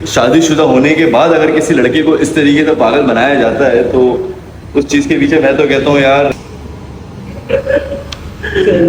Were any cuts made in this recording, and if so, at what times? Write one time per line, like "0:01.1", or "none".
0:06.3